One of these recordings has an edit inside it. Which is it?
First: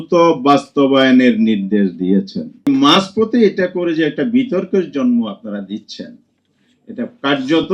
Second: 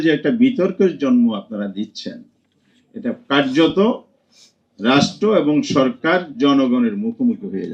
first; 1 cut; at 2.7 s

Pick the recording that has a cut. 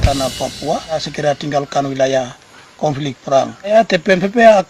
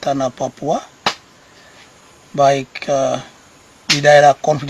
first; 2 cuts; at 1.1 s, 3.7 s

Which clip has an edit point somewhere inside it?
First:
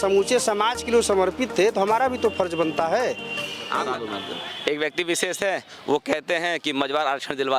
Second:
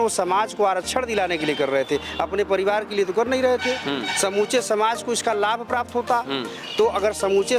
first; 1 cut; at 3.9 s

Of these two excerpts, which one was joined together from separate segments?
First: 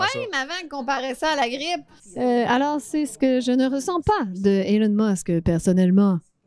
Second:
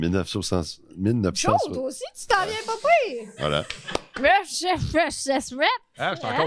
first; 1 cut; at 1.9 s

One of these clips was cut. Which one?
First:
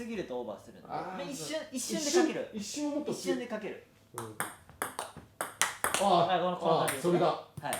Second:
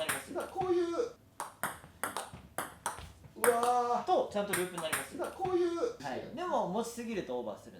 second; 2 cuts; at 1.1 s, 6.1 s

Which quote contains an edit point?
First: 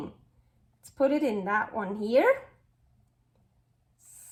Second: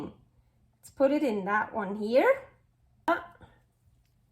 second; 1 cut; at 3.1 s

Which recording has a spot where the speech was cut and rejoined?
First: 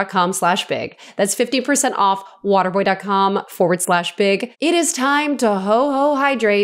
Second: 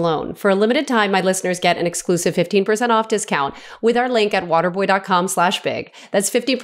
first; 1 cut; at 4.5 s

